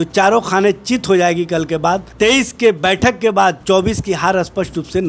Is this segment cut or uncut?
cut